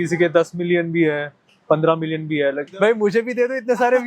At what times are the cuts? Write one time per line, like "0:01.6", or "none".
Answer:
0:02.7